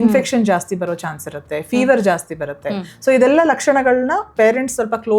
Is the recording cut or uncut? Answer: uncut